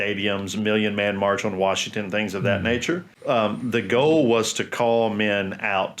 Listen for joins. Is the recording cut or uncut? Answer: cut